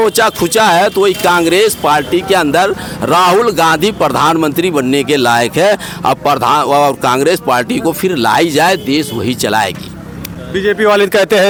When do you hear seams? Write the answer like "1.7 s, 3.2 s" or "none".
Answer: none